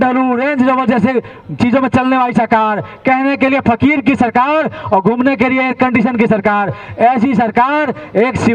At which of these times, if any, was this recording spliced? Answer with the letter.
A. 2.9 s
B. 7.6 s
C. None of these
C